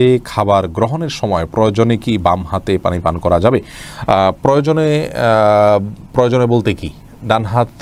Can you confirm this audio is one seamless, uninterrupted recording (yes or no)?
yes